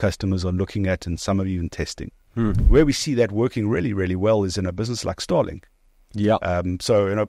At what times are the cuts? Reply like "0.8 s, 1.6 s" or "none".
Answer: 2.6 s